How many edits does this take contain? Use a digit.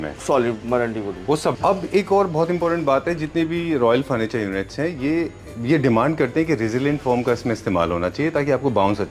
1